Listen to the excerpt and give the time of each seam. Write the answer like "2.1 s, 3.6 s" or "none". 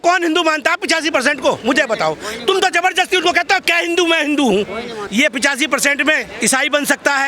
5.0 s